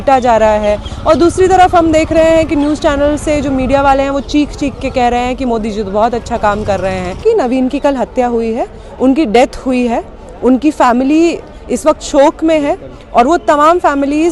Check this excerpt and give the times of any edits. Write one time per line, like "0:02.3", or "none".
0:07.2